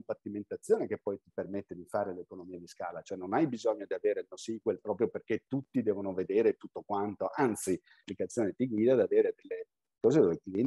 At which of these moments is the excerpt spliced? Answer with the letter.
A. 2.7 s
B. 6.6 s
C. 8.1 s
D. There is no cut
C